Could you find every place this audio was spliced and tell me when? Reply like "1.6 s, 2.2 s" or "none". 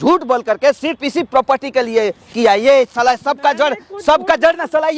none